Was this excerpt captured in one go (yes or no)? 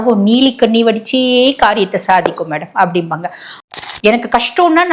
no